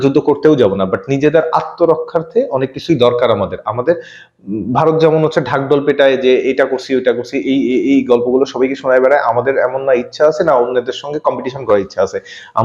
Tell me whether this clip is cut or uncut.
uncut